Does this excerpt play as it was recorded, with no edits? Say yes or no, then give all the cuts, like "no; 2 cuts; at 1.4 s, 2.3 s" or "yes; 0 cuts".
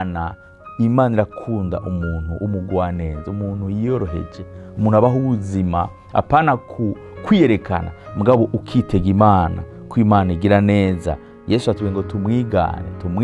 yes; 0 cuts